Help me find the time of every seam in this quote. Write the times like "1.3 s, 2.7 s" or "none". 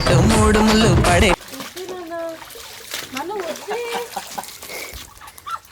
1.4 s

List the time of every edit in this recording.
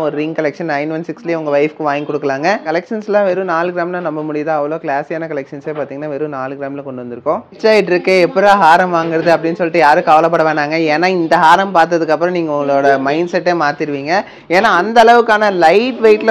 2.6 s, 7.4 s

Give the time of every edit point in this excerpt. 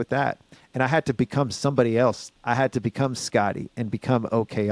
2.3 s

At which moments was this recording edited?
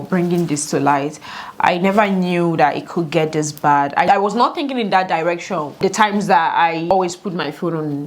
4.1 s, 5.8 s, 6.9 s

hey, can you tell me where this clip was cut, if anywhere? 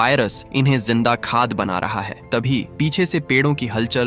none

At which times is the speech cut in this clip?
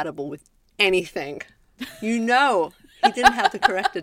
2.8 s

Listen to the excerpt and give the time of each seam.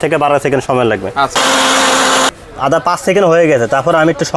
1.3 s, 2.3 s

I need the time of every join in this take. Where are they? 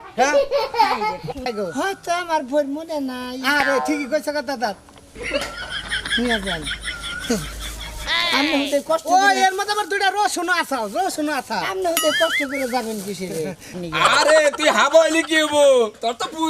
1.5 s, 13.7 s

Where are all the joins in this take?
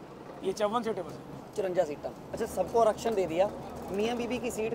2.3 s

